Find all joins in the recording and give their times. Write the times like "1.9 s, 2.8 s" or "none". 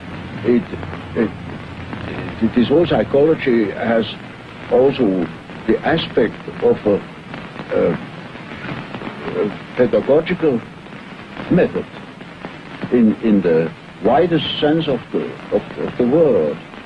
none